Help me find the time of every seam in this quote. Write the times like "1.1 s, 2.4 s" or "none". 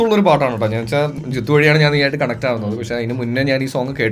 1.2 s